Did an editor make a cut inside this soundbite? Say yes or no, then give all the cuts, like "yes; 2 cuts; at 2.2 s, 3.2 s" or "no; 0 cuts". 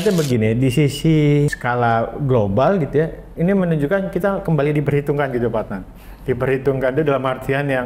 yes; 1 cut; at 1.5 s